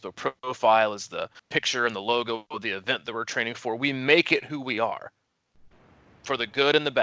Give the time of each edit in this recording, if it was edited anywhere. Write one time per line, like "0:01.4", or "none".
0:01.4